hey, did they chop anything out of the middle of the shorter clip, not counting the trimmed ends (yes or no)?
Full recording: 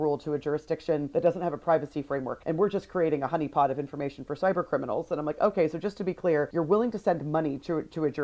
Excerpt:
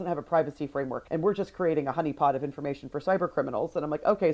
no